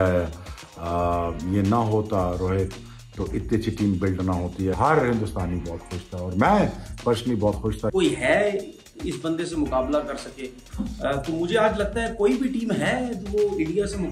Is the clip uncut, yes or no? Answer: no